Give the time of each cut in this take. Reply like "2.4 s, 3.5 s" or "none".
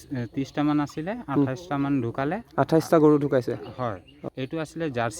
4.1 s